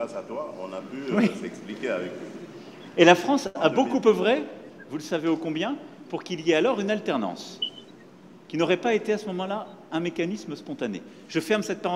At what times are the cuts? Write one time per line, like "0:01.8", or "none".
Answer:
none